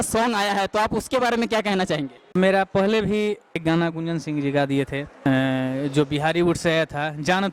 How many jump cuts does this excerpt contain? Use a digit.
3